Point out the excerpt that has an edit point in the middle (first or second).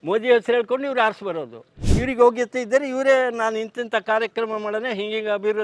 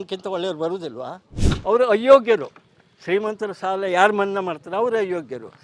second